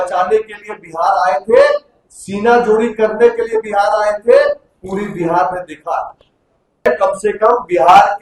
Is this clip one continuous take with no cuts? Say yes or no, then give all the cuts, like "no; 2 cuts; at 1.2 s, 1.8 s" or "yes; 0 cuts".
no; 1 cut; at 6.9 s